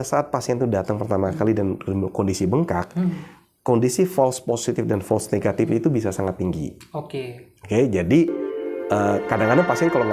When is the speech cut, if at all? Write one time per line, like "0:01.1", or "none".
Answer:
none